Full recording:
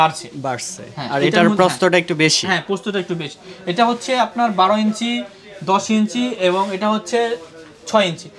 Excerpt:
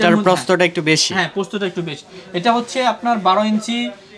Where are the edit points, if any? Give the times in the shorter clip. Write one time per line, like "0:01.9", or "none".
none